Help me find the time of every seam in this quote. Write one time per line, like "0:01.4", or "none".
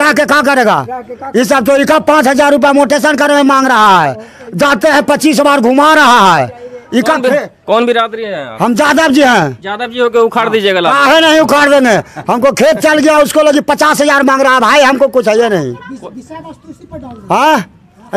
none